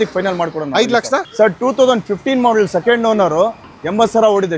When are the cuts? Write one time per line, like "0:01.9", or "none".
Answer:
0:01.3